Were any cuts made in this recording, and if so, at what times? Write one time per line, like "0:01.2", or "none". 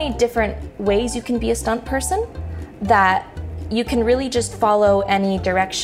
none